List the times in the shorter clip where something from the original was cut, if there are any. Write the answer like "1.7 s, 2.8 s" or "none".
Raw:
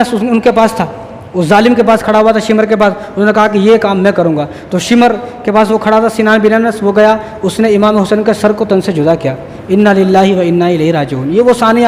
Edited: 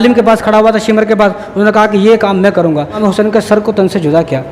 3.0 s

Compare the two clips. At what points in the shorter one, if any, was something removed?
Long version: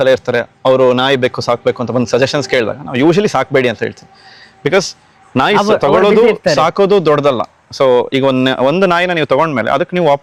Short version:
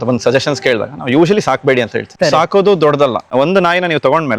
2.1 s, 3.3 s

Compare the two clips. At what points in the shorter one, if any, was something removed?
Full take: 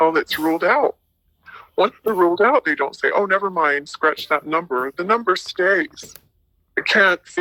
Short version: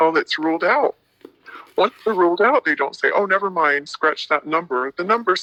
none

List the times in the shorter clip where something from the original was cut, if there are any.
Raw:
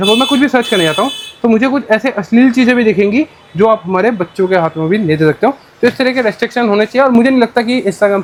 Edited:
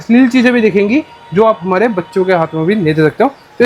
none

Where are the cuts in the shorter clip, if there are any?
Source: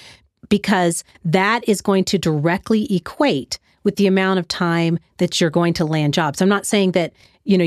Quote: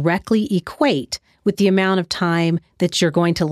none

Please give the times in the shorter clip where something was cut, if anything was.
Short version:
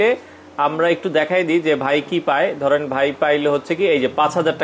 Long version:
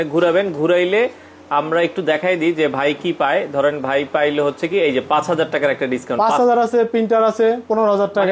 none

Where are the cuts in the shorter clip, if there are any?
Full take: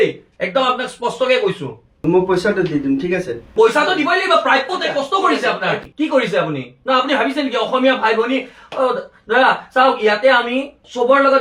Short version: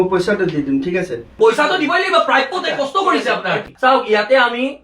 3.7 s

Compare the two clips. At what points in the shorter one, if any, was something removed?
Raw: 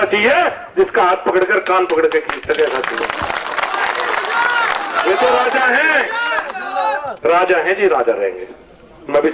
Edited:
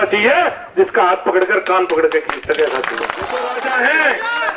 3.3 s

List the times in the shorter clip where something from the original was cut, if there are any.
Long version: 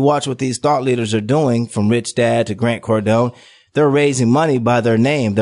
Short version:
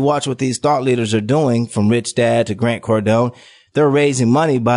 none

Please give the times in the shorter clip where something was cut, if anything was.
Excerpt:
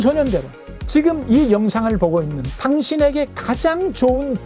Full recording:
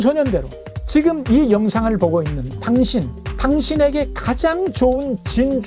2.4 s

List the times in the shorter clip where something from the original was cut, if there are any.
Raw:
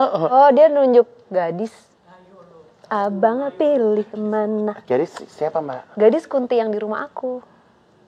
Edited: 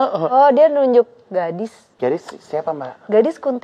1.9 s

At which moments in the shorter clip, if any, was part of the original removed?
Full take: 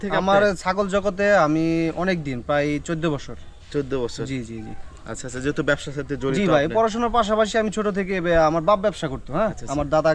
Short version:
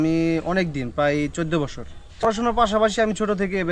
2.2 s

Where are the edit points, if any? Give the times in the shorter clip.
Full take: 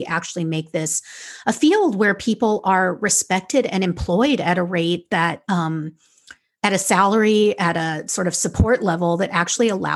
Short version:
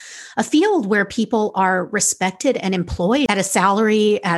3.3 s

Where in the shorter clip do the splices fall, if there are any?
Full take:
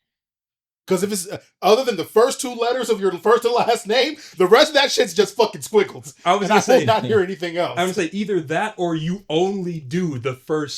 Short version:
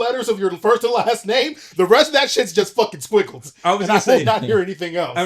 none

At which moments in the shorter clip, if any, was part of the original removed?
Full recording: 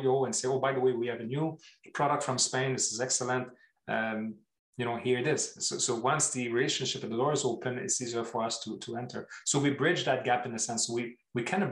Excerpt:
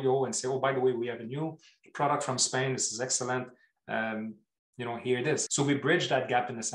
5.5 s

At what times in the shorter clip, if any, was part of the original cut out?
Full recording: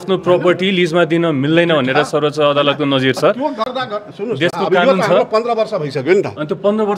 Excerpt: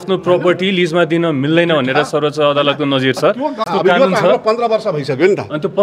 3.7 s

